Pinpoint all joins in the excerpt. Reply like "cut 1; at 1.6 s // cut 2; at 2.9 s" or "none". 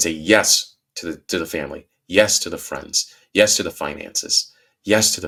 none